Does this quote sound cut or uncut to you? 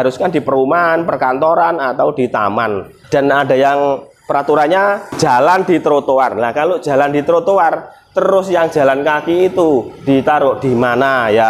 cut